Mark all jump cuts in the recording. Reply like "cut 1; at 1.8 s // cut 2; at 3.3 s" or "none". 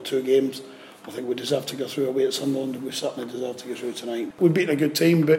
cut 1; at 4.3 s